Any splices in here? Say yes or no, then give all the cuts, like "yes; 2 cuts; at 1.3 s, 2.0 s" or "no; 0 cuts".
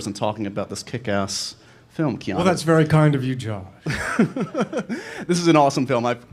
no; 0 cuts